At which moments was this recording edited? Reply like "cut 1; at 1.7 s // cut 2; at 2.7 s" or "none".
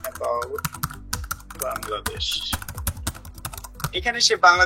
none